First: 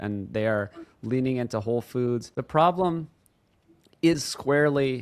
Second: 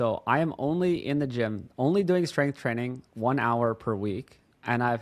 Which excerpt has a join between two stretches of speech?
first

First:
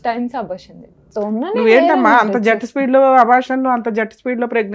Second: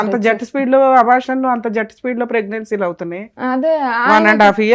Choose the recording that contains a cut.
first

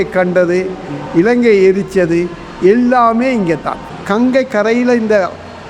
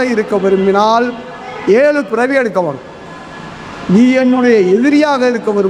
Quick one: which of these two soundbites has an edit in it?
first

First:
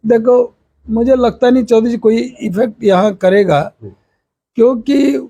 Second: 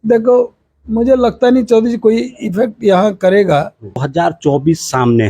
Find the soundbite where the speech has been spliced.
second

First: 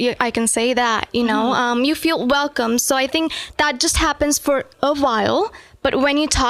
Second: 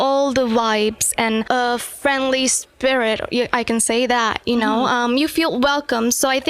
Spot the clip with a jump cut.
second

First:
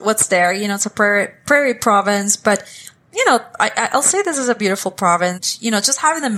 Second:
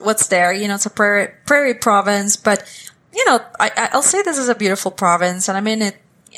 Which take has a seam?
first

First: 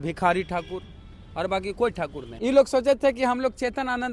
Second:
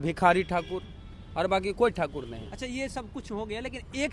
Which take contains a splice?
first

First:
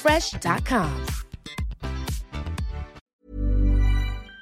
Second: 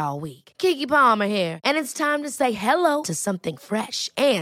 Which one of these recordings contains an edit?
first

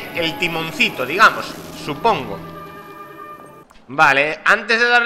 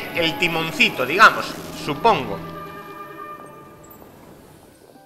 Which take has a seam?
first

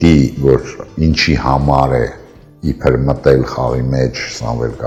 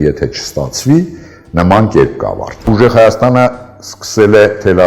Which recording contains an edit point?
second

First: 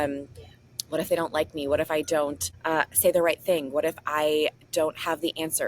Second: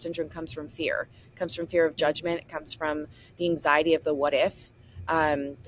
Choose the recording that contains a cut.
first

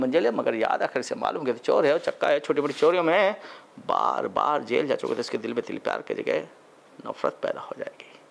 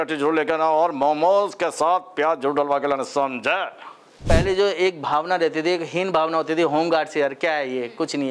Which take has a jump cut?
second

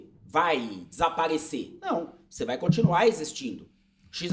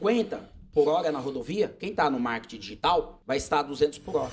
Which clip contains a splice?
second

